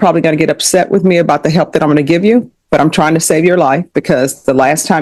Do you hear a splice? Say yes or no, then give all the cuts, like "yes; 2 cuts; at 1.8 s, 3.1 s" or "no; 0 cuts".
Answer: no; 0 cuts